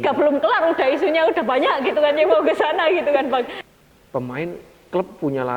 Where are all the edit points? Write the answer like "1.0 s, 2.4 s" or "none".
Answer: 3.6 s